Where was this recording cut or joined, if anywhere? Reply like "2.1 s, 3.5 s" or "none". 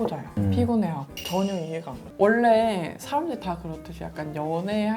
2.1 s